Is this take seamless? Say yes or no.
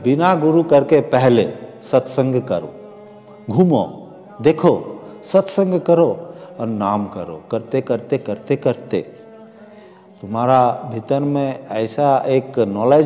yes